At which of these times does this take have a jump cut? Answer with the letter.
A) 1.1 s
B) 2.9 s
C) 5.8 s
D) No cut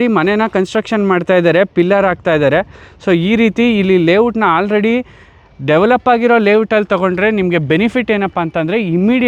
D